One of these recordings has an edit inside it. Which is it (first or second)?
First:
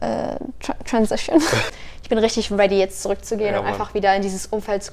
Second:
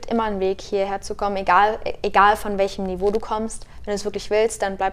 first